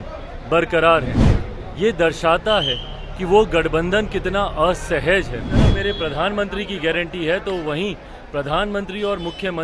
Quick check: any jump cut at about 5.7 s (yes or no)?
yes